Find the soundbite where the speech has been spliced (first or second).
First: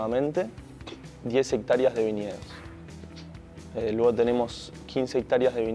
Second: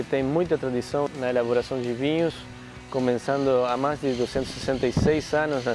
second